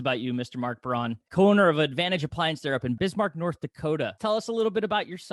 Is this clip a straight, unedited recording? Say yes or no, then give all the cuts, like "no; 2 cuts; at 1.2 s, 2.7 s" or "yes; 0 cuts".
no; 3 cuts; at 1.3 s, 3.0 s, 4.2 s